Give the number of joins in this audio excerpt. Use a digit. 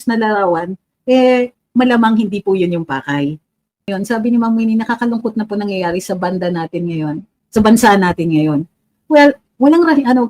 1